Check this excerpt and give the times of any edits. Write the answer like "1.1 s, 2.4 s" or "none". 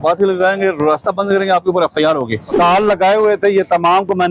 2.5 s